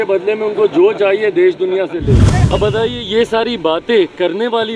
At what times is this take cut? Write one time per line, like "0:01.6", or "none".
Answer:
0:02.5